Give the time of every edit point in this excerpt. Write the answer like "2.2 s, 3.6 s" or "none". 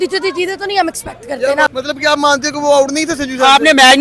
1.7 s